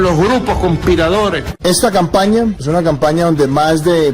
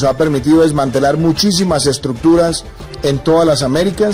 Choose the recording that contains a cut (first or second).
first